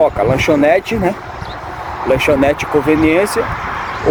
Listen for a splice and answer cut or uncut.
uncut